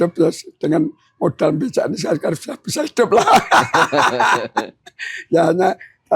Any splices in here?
no; 0 cuts

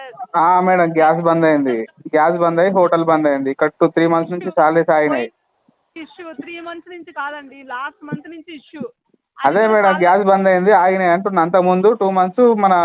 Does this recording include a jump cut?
no; 0 cuts

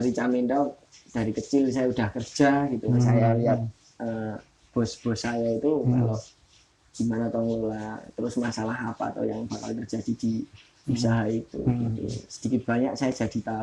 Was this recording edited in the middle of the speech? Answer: no; 0 cuts

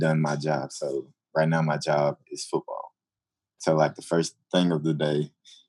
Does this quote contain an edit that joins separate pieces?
yes; 1 cut; at 4.4 s

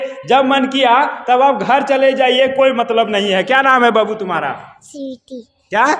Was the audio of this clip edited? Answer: no; 0 cuts

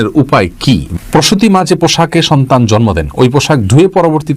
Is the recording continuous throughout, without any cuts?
no; 1 cut; at 0.9 s

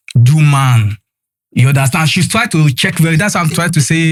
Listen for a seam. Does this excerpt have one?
no; 0 cuts

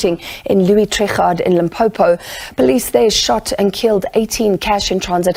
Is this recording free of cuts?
yes; 0 cuts

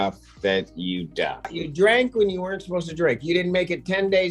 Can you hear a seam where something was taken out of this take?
yes; 1 cut; at 1.6 s

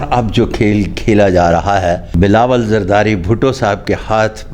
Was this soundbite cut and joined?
yes; 1 cut; at 2.1 s

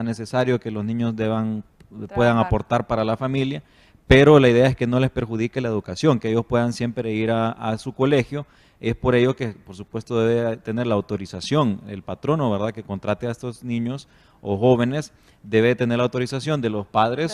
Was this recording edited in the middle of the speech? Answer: no; 0 cuts

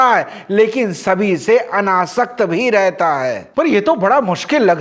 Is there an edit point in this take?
yes; 1 cut; at 3.4 s

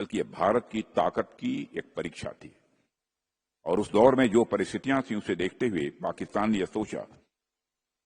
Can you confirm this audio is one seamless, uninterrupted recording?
yes; 0 cuts

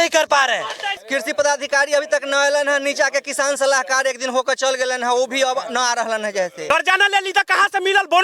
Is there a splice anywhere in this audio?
yes; 2 cuts; at 1.0 s, 6.7 s

